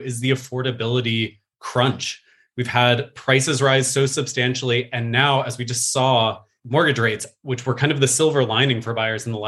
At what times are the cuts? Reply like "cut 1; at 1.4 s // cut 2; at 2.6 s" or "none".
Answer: cut 1; at 6.5 s